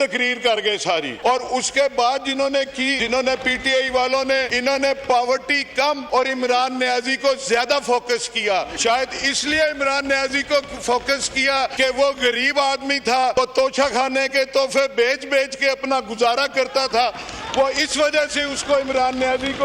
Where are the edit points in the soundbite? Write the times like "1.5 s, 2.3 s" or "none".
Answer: 1.1 s, 3.0 s, 4.5 s, 6.0 s, 8.7 s, 11.7 s, 13.3 s